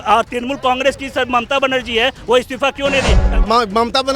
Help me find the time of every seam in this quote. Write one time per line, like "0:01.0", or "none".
0:03.2

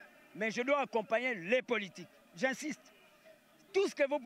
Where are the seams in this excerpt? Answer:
none

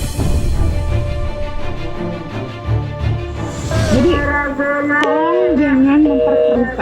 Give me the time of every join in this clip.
0:03.7

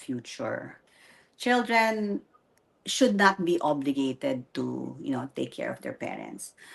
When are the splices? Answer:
none

